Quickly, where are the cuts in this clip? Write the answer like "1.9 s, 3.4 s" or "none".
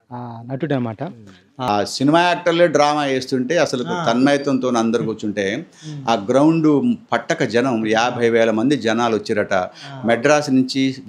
1.7 s